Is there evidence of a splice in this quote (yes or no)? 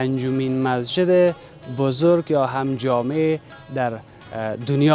no